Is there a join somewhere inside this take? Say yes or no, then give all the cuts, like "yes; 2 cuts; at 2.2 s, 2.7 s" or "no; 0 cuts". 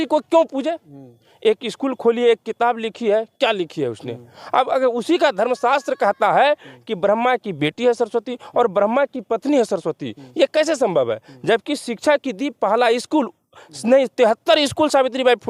no; 0 cuts